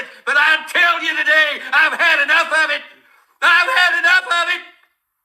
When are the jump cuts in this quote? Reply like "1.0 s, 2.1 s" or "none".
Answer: 2.0 s